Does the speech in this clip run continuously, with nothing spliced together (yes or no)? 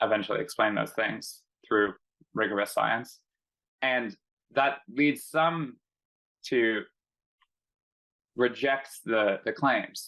yes